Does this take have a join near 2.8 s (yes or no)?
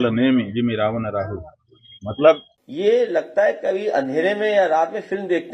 yes